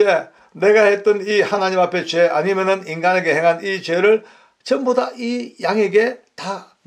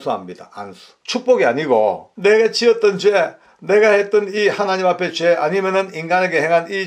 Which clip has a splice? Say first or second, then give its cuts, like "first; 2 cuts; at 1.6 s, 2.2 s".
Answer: second; 2 cuts; at 1.0 s, 2.1 s